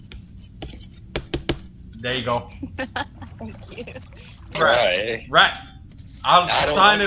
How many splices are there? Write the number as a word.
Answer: one